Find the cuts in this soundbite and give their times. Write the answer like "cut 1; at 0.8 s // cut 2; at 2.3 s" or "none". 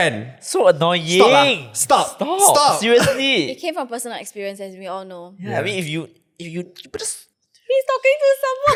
none

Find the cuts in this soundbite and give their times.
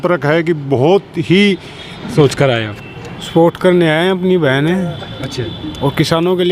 cut 1; at 2.1 s

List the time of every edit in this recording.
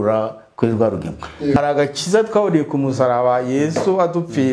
cut 1; at 1.6 s

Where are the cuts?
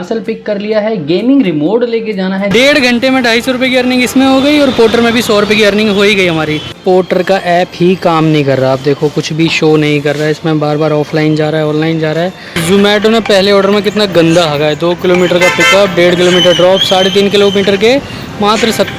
cut 1; at 2.5 s // cut 2; at 6.7 s // cut 3; at 12.5 s

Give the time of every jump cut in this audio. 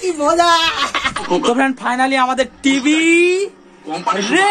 cut 1; at 1.2 s

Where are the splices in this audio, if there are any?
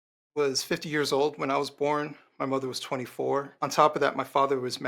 cut 1; at 3.5 s

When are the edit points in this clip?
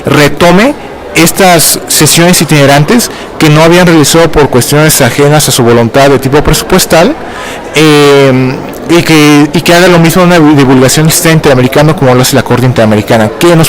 cut 1; at 11.4 s

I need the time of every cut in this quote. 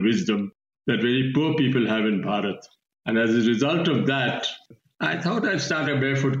cut 1; at 4.7 s

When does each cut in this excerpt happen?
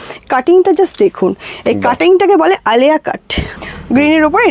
cut 1; at 3.5 s

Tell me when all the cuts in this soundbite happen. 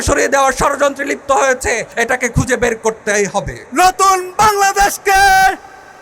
cut 1; at 1.9 s // cut 2; at 3.6 s

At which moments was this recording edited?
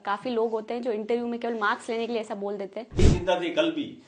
cut 1; at 3.0 s

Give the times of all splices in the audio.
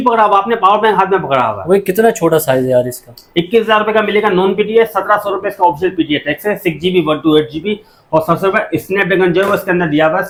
none

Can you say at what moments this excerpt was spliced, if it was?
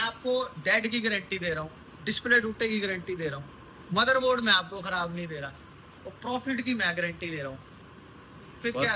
none

